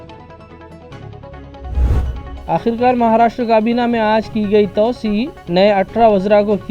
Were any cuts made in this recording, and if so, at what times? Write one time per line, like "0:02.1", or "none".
0:01.8